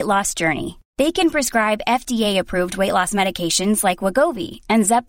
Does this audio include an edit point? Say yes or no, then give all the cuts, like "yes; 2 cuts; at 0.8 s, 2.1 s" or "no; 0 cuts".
no; 0 cuts